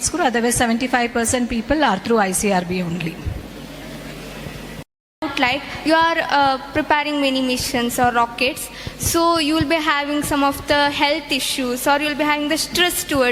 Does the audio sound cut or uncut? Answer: cut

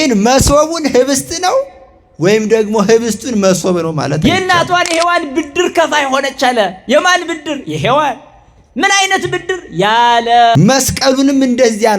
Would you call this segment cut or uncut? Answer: cut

